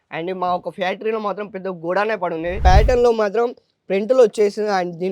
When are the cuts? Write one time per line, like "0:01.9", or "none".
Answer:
0:02.5